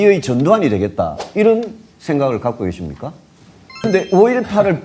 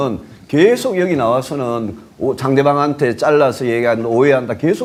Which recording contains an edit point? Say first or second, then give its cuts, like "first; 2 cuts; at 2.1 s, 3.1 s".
first; 1 cut; at 3.9 s